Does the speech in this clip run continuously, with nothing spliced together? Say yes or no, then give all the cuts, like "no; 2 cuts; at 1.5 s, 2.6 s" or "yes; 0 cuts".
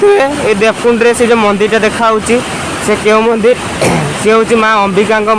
yes; 0 cuts